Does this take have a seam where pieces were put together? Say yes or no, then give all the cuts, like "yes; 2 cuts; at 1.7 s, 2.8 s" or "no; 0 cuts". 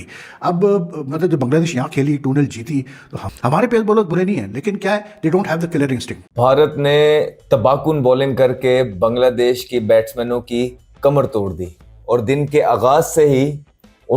yes; 1 cut; at 6.2 s